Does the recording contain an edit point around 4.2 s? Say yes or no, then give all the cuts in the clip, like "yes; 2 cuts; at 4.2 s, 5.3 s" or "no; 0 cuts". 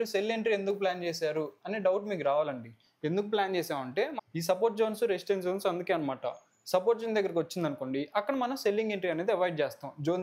yes; 1 cut; at 4.2 s